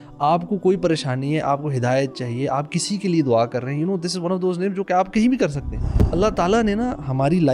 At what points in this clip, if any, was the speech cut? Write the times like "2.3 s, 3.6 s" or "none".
6.1 s